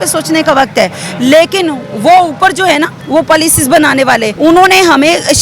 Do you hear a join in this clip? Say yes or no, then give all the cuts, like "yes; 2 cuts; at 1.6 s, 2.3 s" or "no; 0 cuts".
yes; 2 cuts; at 3.0 s, 4.3 s